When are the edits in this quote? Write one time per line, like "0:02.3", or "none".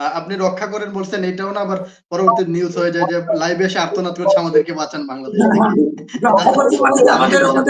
none